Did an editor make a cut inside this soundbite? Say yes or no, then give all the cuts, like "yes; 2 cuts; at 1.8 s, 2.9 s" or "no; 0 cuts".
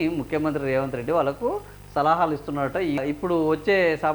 yes; 1 cut; at 3.0 s